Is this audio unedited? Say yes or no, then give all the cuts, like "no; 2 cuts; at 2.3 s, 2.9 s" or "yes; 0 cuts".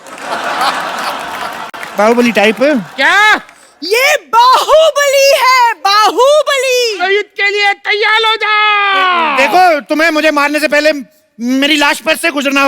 yes; 0 cuts